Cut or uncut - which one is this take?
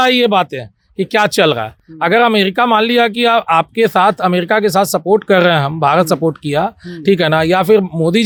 uncut